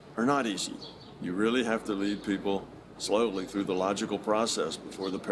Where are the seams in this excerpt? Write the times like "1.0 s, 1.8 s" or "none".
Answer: none

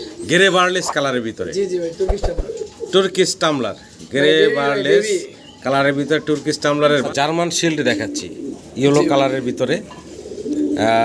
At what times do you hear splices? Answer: 7.0 s

